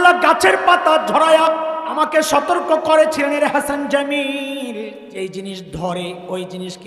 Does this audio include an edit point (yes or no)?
yes